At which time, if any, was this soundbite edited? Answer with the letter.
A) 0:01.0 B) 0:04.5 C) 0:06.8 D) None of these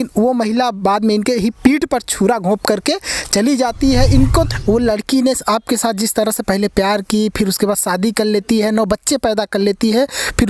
B